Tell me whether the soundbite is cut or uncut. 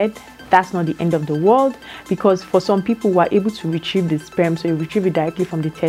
uncut